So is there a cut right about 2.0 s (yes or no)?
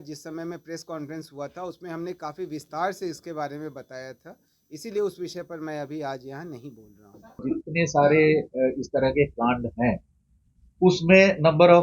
no